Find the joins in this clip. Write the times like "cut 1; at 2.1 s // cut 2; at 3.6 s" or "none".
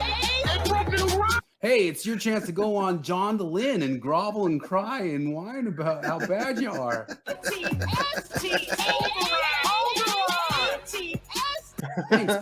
cut 1; at 1.5 s